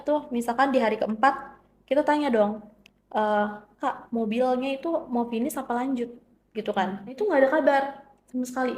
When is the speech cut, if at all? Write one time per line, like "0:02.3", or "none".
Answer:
0:07.2